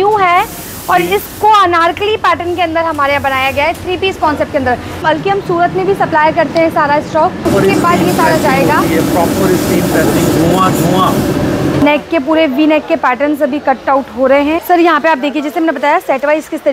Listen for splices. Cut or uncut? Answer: cut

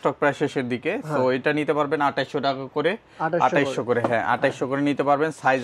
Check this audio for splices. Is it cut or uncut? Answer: uncut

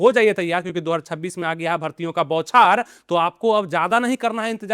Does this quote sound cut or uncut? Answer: uncut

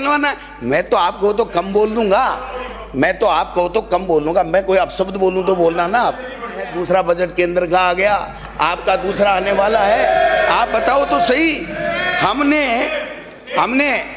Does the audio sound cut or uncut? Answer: cut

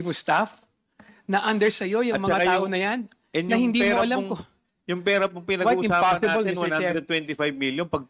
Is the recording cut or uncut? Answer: uncut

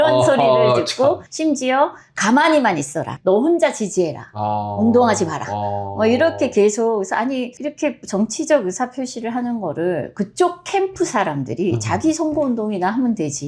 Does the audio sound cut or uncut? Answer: uncut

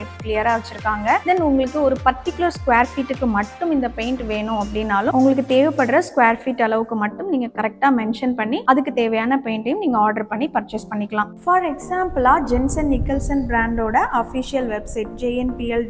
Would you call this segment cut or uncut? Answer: uncut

